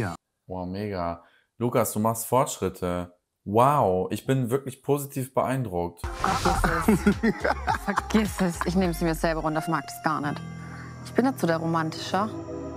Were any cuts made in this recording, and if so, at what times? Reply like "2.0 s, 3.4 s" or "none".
6.0 s